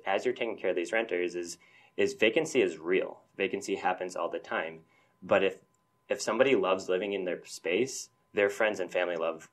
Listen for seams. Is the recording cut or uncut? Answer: uncut